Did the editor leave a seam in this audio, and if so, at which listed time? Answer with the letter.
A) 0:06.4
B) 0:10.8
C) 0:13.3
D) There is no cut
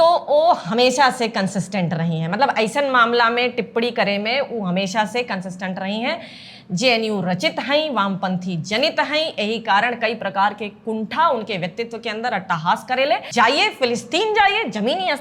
C